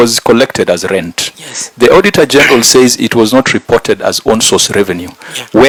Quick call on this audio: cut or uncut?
uncut